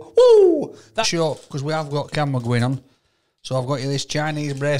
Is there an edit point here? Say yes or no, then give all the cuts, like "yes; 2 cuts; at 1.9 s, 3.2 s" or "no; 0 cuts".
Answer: yes; 1 cut; at 1.1 s